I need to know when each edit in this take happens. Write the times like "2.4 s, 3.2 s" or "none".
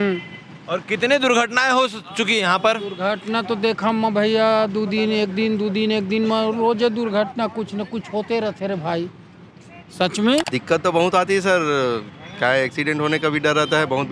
10.5 s